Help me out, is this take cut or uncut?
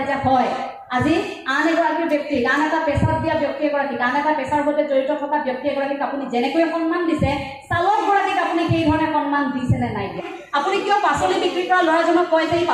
cut